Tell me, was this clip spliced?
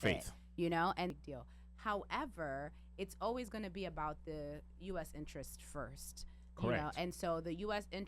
yes; 1 cut; at 1.1 s

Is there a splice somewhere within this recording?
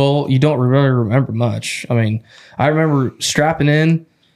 no; 0 cuts

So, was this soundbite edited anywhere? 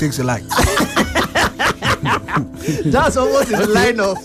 no; 0 cuts

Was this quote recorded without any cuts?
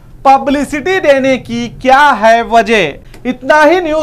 no; 1 cut; at 3.0 s

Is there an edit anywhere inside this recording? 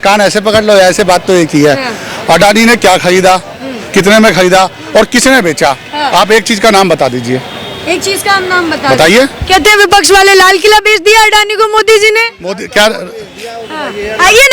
no; 0 cuts

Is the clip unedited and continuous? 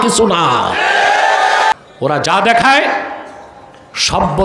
no; 1 cut; at 1.7 s

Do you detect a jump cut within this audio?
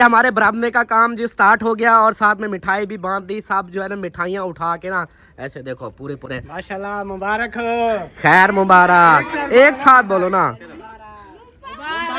no; 0 cuts

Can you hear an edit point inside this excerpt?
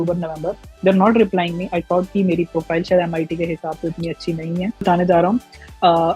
yes; 1 cut; at 4.8 s

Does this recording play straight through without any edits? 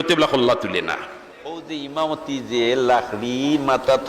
no; 1 cut; at 1.5 s

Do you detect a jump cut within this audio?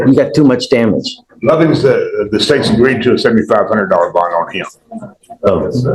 no; 0 cuts

